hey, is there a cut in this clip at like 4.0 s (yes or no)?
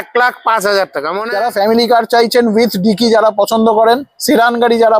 no